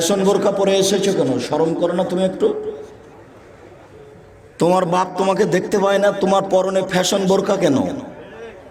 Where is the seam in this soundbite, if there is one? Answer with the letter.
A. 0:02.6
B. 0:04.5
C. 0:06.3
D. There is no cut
D